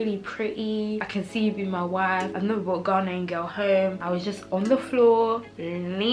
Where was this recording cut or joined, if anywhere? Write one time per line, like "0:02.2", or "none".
0:01.0
0:02.3
0:04.0